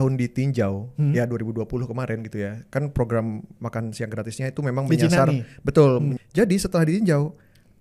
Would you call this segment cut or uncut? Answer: cut